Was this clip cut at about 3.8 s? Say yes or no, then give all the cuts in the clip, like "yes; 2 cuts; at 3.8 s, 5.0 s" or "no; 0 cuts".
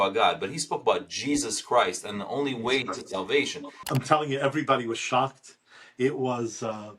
yes; 1 cut; at 3.8 s